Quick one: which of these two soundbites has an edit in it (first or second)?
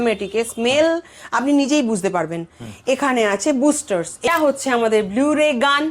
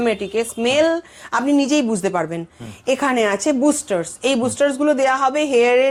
first